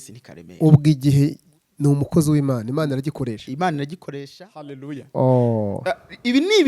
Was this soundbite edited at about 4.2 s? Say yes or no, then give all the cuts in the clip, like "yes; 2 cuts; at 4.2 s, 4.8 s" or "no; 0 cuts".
yes; 1 cut; at 4.2 s